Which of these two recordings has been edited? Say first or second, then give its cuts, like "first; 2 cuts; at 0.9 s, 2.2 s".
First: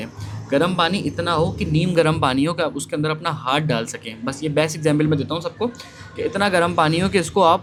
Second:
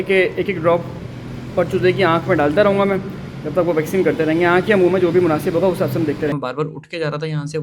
second; 1 cut; at 6.3 s